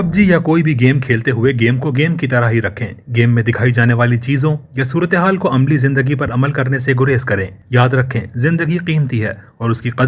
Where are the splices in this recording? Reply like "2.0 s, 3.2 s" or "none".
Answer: none